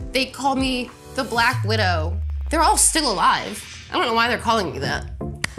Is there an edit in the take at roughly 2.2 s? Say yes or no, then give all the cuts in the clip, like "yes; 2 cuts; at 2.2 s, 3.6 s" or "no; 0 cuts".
yes; 1 cut; at 2.2 s